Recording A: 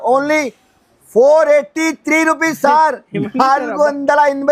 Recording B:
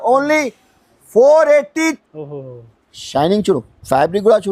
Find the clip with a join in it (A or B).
B